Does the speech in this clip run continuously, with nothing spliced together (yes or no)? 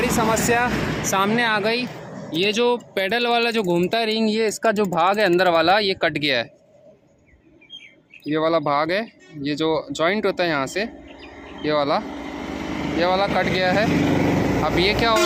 yes